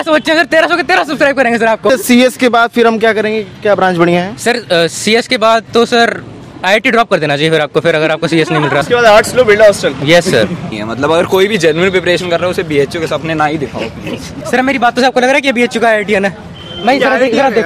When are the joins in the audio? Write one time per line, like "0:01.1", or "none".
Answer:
0:01.9
0:08.8
0:10.8
0:14.3